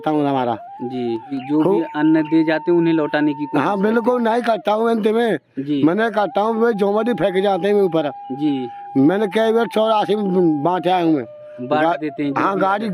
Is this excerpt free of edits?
no; 1 cut; at 1.3 s

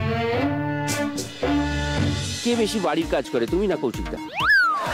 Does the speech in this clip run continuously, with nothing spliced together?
no; 1 cut; at 2.4 s

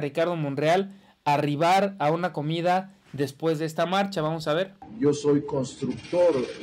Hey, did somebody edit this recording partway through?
yes; 1 cut; at 4.8 s

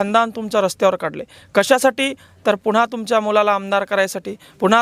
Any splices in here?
no; 0 cuts

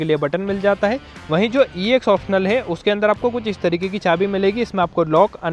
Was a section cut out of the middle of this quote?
yes; 1 cut; at 1.1 s

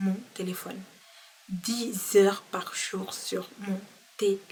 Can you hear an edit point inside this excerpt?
no; 0 cuts

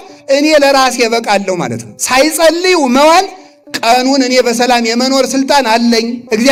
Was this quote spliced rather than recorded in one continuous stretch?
no; 0 cuts

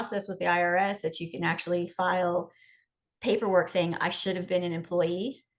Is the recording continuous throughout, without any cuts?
yes; 0 cuts

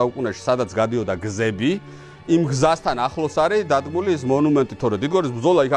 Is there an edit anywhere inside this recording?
no; 0 cuts

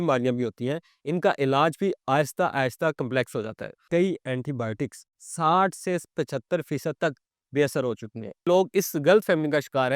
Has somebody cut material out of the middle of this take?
yes; 2 cuts; at 3.8 s, 8.5 s

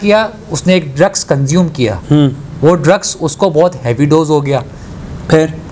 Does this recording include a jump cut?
no; 0 cuts

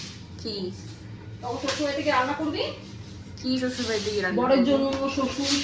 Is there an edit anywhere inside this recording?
no; 0 cuts

